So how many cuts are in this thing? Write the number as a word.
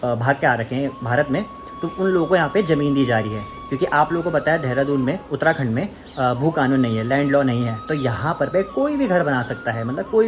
zero